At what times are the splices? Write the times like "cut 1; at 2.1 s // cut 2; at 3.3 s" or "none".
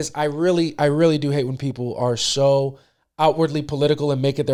none